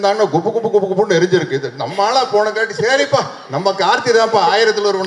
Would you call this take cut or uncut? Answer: uncut